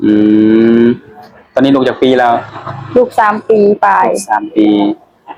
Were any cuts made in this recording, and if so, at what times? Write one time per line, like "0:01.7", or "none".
none